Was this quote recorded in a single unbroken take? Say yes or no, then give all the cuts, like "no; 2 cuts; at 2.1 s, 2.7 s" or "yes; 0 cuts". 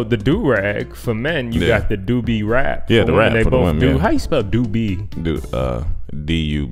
yes; 0 cuts